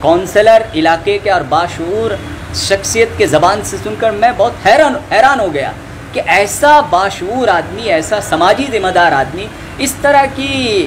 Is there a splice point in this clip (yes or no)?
no